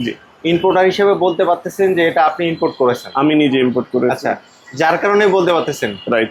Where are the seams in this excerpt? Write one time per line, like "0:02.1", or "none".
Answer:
none

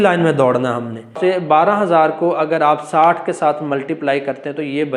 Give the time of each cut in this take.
0:01.2

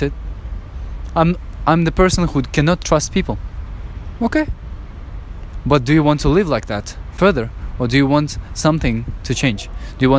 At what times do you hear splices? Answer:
none

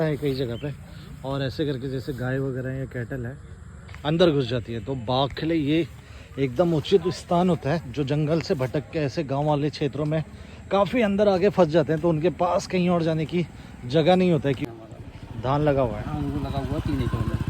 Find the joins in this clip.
0:14.6

